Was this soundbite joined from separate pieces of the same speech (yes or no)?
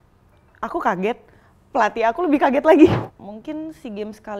yes